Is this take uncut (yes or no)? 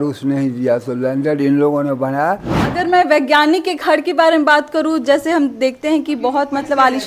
no